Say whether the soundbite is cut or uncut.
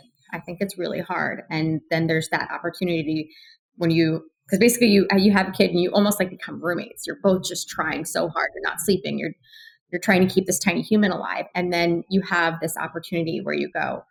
uncut